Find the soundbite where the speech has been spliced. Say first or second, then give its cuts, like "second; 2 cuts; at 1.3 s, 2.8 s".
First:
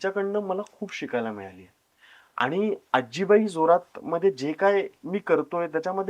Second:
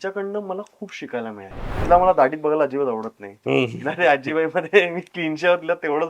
second; 1 cut; at 1.7 s